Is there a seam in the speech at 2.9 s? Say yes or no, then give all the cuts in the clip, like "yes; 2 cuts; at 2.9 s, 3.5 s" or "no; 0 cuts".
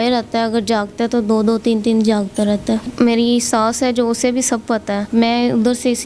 yes; 2 cuts; at 2.9 s, 5.0 s